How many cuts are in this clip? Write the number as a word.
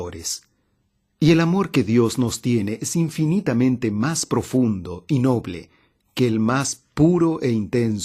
one